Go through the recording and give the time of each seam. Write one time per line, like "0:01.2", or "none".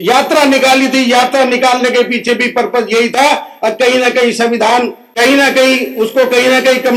none